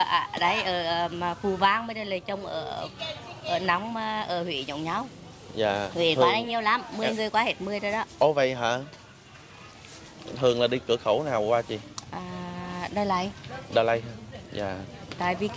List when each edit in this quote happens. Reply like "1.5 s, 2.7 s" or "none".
none